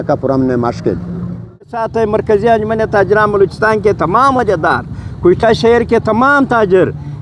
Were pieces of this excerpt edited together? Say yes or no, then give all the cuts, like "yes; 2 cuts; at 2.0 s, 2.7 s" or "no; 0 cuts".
yes; 1 cut; at 1.8 s